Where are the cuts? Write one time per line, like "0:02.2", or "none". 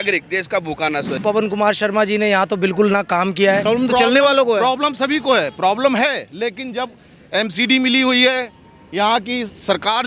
0:01.2
0:03.6